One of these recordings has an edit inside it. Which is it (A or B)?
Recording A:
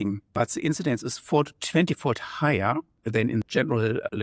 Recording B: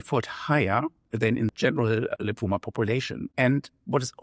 B